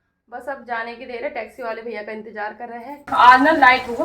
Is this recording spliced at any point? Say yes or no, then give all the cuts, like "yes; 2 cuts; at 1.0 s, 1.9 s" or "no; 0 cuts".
yes; 1 cut; at 3.1 s